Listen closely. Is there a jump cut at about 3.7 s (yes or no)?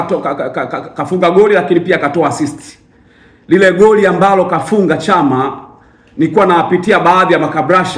no